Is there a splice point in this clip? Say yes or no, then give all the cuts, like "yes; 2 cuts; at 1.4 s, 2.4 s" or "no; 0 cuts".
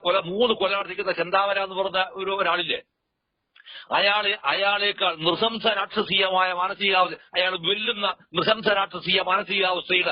no; 0 cuts